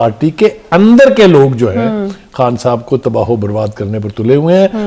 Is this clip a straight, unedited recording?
yes; 0 cuts

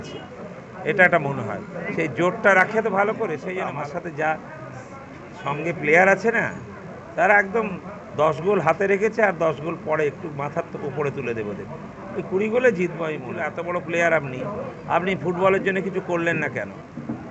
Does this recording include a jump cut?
yes; 2 cuts; at 3.5 s, 13.4 s

